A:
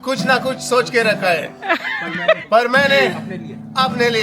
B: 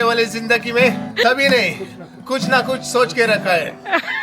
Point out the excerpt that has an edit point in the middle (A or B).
B